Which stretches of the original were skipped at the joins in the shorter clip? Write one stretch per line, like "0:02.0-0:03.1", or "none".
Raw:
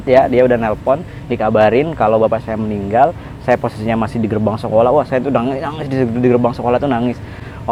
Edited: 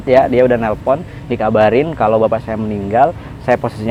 none